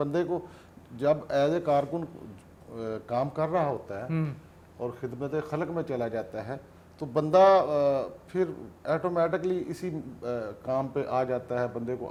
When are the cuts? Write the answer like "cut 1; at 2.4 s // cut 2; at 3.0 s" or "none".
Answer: none